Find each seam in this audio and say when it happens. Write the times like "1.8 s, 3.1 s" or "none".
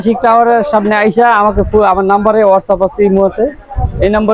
none

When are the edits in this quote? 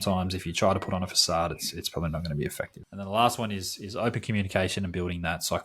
2.8 s

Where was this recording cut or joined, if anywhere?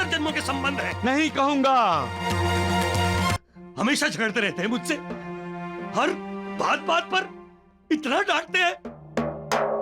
3.4 s

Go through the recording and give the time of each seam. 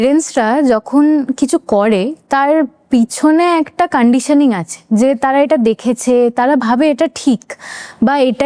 none

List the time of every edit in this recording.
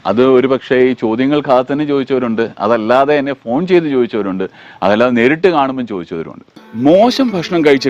6.6 s

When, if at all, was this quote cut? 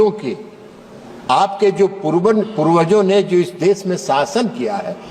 none

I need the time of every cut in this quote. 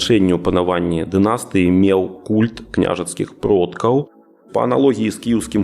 4.1 s

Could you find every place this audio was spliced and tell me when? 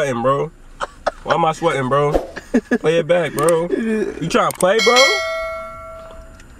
none

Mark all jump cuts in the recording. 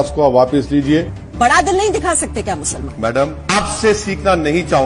1.1 s, 3.4 s

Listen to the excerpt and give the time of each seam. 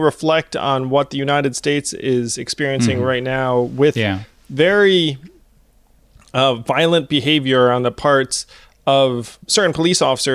4.3 s, 9.4 s

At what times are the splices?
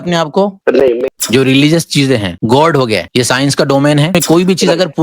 1.1 s, 2.3 s, 3.1 s, 4.1 s

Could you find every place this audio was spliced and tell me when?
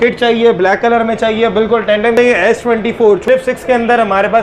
2.1 s, 3.2 s

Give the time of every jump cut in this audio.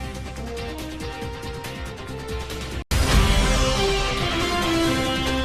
none

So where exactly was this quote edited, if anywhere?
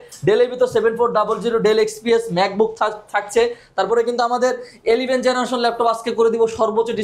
none

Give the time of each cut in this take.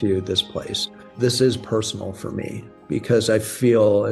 1.1 s

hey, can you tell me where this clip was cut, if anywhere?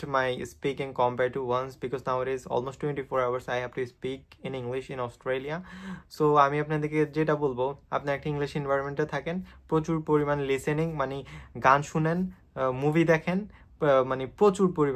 none

